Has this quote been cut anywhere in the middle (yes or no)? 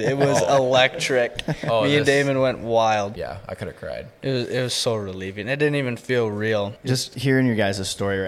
yes